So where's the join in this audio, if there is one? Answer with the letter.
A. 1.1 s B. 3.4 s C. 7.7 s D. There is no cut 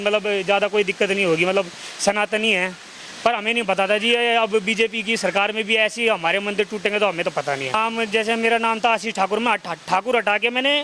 C